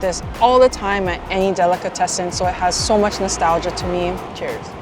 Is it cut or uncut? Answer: uncut